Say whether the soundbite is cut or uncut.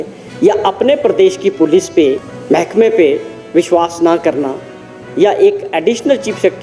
cut